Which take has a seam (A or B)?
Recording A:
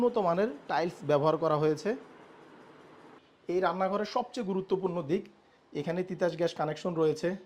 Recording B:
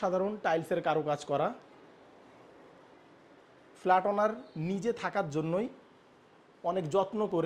A